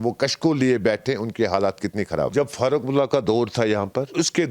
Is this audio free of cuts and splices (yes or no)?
no